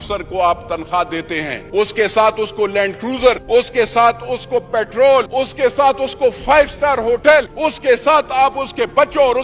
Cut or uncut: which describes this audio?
cut